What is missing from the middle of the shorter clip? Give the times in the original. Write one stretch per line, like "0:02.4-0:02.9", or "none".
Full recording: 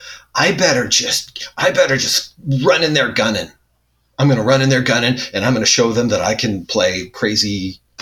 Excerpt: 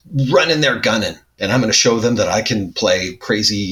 0:03.7-0:05.3